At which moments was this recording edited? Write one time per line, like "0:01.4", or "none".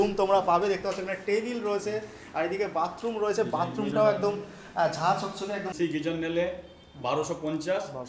0:05.7